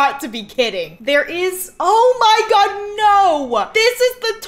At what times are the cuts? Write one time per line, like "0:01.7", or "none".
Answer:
none